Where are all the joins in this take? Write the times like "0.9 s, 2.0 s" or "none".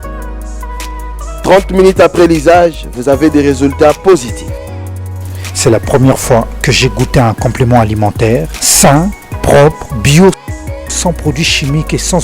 1.2 s